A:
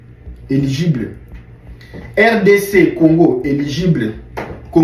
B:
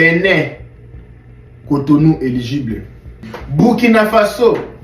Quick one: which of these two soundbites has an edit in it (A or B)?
B